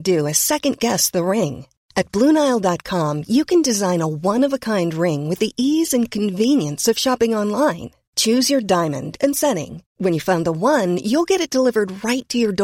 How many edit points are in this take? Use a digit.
0